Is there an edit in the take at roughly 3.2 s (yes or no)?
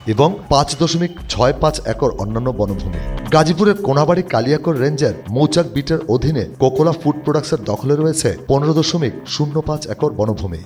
yes